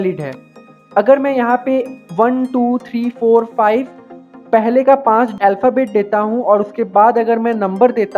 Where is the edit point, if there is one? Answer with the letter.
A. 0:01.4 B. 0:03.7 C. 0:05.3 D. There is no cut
C